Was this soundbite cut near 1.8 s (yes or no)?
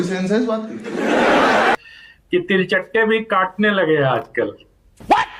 yes